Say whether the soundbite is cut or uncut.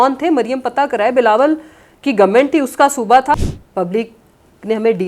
cut